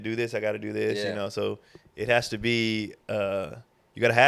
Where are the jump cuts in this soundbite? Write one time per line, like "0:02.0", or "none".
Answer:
none